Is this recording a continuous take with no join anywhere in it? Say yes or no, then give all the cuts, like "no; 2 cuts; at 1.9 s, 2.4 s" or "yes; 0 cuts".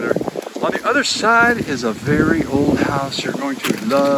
yes; 0 cuts